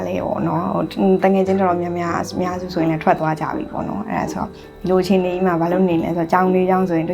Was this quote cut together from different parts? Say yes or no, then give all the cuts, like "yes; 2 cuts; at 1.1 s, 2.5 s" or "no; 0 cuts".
no; 0 cuts